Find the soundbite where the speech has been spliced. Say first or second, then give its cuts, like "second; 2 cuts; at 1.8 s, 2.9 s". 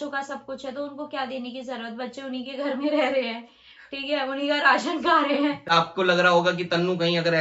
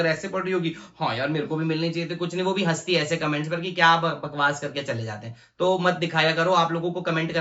first; 1 cut; at 5.7 s